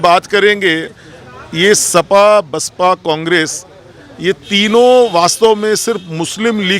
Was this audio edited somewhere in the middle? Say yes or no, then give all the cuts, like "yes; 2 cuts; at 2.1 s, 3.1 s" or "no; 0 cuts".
no; 0 cuts